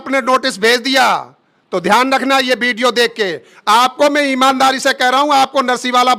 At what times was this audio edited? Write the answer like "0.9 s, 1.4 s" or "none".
none